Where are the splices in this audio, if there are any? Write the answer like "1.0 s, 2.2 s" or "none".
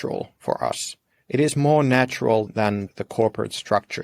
2.8 s